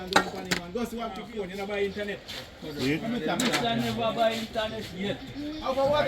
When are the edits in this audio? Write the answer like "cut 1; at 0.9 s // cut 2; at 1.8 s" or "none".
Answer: cut 1; at 1.2 s

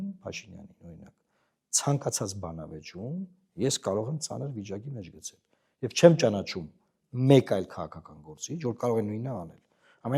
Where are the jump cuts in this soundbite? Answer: none

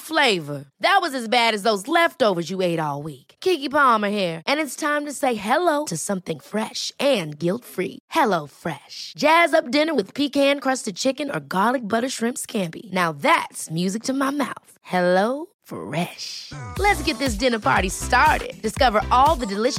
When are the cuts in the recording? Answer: none

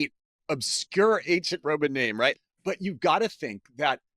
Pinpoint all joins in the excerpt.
cut 1; at 2.4 s

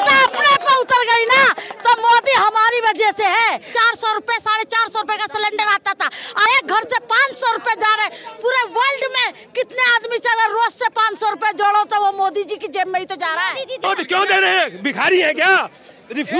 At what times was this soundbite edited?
cut 1; at 3.7 s // cut 2; at 6.5 s // cut 3; at 13.8 s

